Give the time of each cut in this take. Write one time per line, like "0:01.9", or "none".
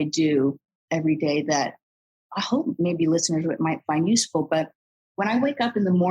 0:02.8